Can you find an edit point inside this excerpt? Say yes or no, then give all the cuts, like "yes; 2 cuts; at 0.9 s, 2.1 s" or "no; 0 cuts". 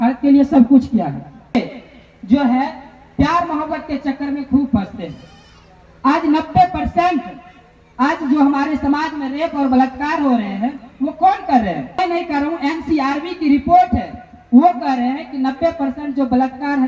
yes; 2 cuts; at 1.5 s, 11.9 s